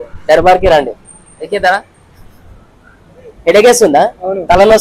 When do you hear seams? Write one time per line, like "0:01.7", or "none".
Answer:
none